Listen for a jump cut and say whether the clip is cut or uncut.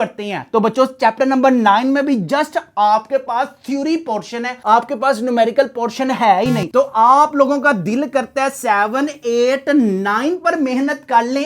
uncut